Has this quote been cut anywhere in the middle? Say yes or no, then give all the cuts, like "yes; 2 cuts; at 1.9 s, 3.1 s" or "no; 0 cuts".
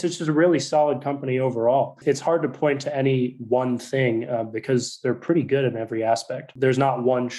yes; 2 cuts; at 2.0 s, 6.5 s